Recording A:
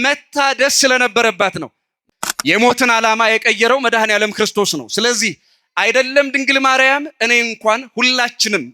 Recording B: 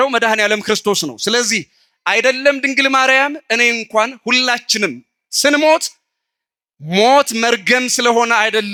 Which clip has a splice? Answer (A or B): A